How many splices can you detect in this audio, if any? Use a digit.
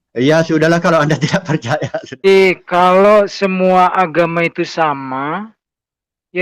1